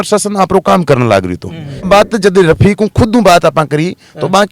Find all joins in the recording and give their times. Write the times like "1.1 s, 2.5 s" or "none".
1.9 s

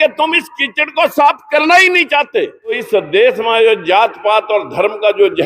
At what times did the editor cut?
2.8 s

